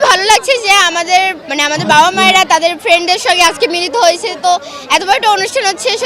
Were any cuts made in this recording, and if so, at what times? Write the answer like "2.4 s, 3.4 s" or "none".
1.5 s